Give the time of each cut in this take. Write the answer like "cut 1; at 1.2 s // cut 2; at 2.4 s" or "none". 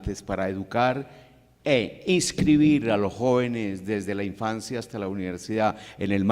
cut 1; at 2.6 s